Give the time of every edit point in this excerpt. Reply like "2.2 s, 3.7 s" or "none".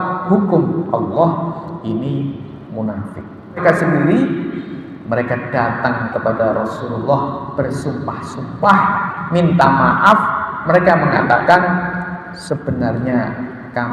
3.6 s